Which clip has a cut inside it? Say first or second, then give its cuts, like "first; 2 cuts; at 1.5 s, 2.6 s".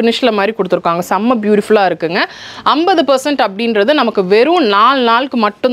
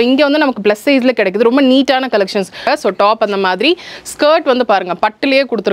second; 1 cut; at 2.6 s